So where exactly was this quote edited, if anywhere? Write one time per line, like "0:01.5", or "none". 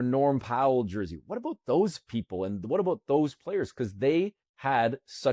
none

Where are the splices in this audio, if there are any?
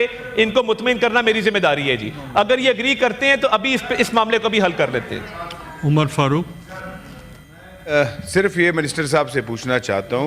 none

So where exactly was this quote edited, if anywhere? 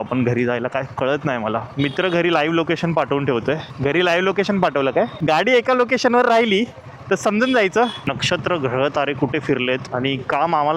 0:01.9
0:05.2
0:08.0

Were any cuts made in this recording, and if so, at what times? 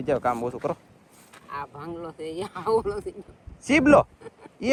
none

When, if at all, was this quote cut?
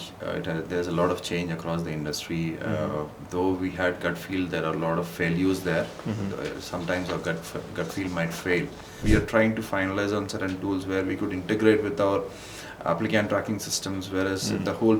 0:09.0

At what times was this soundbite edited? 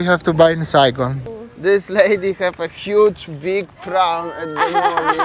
0:01.2

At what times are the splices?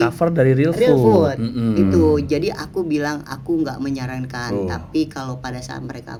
none

